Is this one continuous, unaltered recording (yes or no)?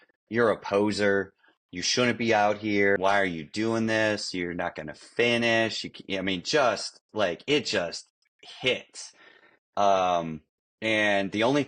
no